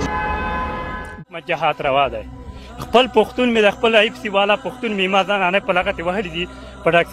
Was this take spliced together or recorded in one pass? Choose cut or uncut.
cut